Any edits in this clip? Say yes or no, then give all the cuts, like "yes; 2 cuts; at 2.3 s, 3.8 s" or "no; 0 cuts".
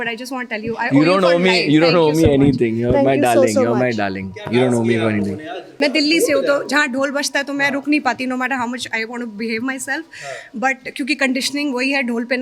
yes; 1 cut; at 5.7 s